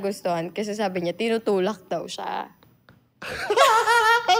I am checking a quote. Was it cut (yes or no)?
no